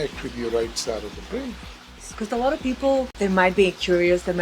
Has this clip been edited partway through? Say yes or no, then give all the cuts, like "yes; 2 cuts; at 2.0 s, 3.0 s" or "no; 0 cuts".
yes; 2 cuts; at 2.1 s, 3.1 s